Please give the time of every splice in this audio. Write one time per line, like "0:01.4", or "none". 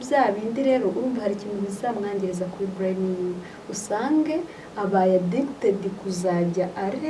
none